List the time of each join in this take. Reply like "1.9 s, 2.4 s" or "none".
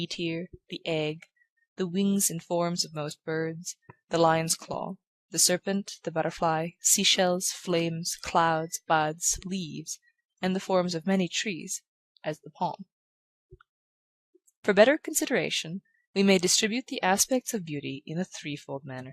2.4 s